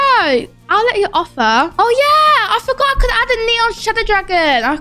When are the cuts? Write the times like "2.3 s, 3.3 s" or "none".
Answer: 1.7 s